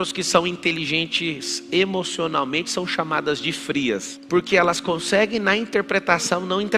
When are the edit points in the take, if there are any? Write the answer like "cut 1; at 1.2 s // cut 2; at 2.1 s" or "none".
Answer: cut 1; at 4.1 s